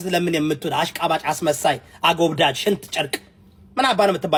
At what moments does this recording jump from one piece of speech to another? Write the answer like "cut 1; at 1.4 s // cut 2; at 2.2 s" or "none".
none